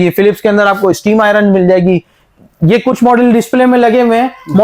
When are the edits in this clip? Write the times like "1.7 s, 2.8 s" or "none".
none

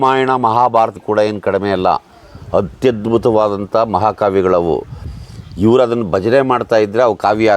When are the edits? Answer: 1.0 s

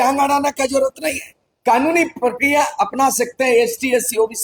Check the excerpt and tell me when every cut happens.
none

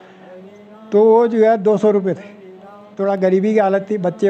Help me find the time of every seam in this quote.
2.9 s

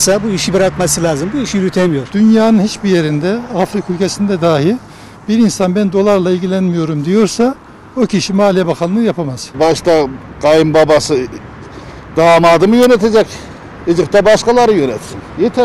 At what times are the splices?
2.1 s, 9.5 s

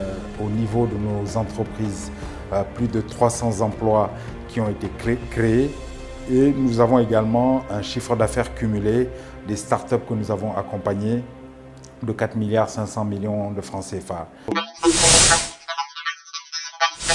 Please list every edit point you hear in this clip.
14.4 s

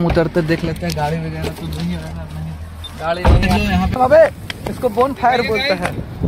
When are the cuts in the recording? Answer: 4.0 s

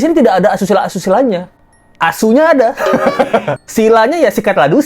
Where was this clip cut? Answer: 3.6 s

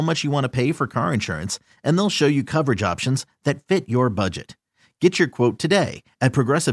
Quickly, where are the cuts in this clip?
none

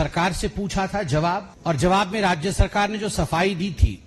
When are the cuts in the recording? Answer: 1.5 s

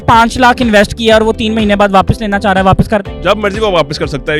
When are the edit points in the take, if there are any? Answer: none

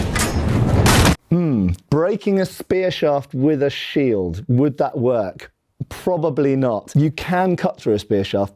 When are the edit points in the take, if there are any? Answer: 1.1 s, 6.9 s

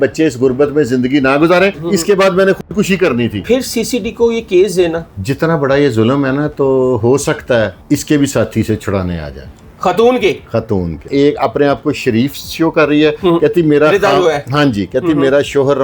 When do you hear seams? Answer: 1.8 s, 3.4 s, 7.8 s, 11.0 s

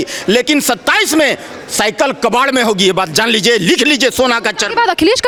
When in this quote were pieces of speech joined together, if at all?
none

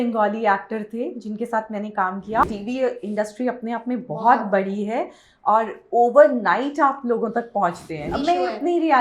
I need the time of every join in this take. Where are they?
2.4 s, 8.1 s

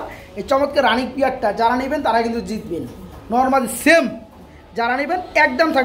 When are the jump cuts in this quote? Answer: none

